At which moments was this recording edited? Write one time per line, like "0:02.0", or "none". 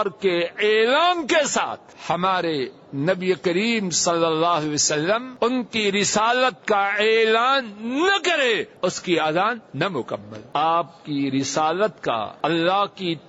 0:01.9
0:05.3
0:08.7
0:10.3
0:12.3